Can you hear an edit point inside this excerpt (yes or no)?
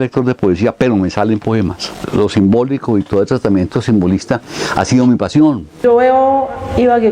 yes